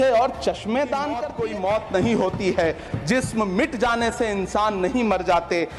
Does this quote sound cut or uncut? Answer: cut